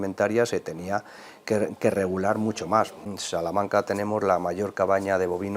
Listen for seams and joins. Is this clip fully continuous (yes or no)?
no